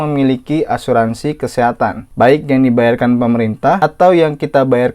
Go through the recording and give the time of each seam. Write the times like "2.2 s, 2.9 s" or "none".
2.0 s, 3.8 s